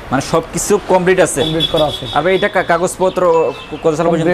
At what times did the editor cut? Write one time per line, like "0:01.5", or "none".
none